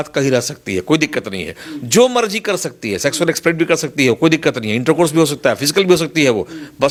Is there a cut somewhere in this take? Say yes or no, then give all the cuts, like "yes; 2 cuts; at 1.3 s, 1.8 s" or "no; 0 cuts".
no; 0 cuts